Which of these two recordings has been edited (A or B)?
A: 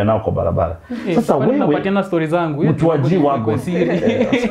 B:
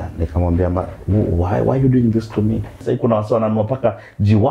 B